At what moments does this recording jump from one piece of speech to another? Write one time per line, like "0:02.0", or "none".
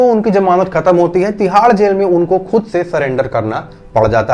none

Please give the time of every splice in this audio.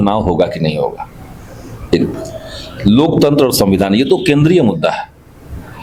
none

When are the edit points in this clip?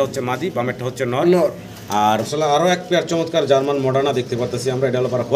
0:02.3

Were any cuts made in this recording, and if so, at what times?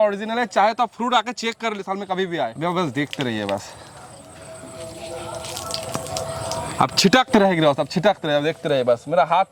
none

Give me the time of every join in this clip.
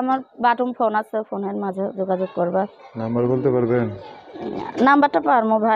none

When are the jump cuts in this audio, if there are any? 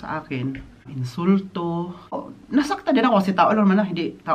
0:01.0
0:02.3

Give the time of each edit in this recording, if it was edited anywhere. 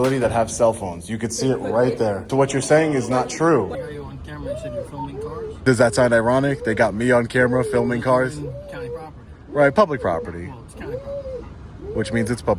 0:02.3
0:03.7
0:05.6

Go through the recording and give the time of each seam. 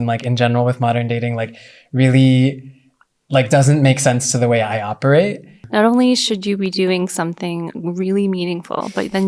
0:05.5

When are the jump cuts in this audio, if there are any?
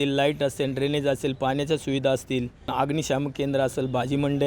0:02.7

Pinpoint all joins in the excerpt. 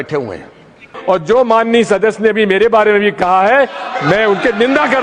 0:00.9

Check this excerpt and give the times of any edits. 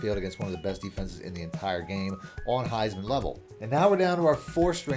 0:03.4

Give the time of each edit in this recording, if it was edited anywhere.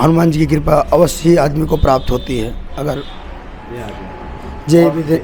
0:03.3

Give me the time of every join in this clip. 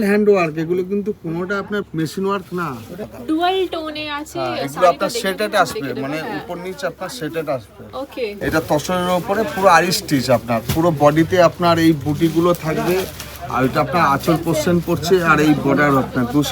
0:01.9
0:03.1
0:08.4

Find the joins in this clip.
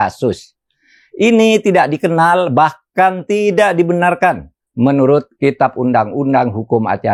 none

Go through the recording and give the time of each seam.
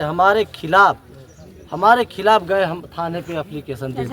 none

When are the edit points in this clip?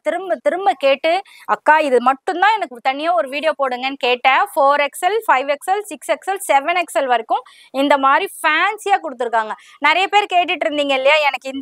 none

